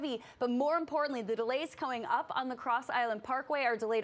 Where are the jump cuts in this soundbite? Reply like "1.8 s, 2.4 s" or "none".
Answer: none